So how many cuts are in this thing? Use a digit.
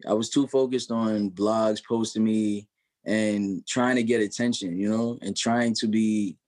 0